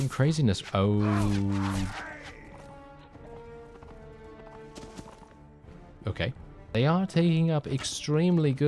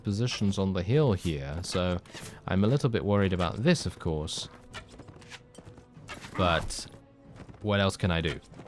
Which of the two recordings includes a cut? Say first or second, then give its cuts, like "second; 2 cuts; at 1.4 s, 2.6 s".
first; 1 cut; at 6.7 s